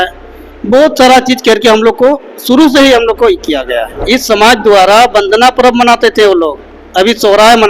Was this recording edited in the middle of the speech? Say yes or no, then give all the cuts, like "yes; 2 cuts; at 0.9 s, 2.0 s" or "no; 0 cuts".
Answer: yes; 1 cut; at 3.9 s